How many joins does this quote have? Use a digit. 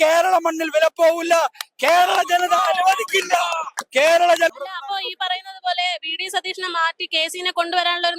1